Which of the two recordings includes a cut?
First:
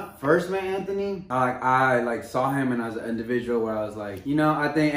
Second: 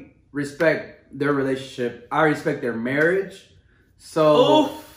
first; 2 cuts; at 1.2 s, 4.1 s

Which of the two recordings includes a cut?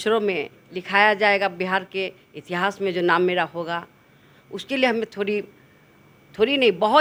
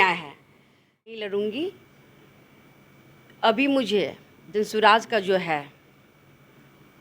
second; 1 cut; at 1.1 s

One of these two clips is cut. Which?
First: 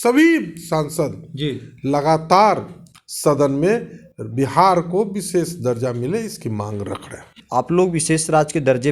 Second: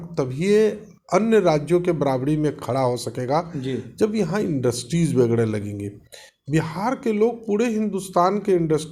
first; 1 cut; at 7.4 s

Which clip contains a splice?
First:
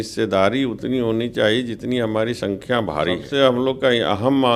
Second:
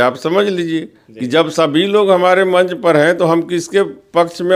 first; 1 cut; at 3.2 s

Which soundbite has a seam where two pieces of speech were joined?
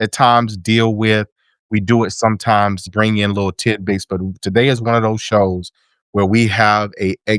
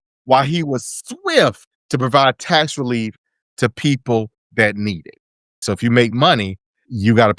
second; 1 cut; at 5.6 s

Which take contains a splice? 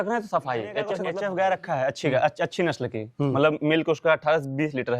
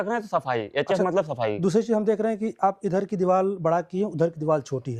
first; 1 cut; at 1.0 s

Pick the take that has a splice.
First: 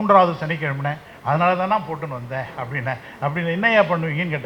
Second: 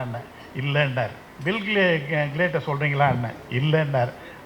second; 1 cut; at 1.3 s

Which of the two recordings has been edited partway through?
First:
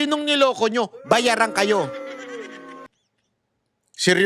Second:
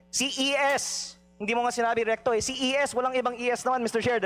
first; 1 cut; at 2.9 s

